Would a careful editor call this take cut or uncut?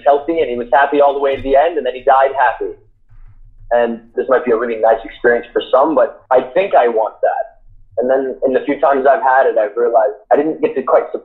cut